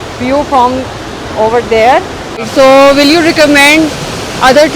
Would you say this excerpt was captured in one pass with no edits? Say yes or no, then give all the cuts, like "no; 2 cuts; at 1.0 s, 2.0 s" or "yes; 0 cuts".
no; 1 cut; at 2.5 s